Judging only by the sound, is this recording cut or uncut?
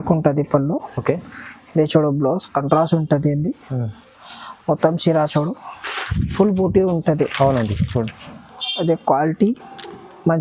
uncut